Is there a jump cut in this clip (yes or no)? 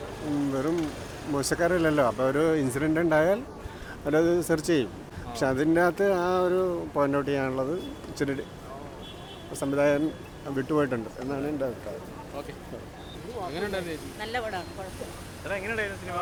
no